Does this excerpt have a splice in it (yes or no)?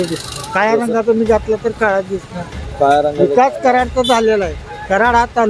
no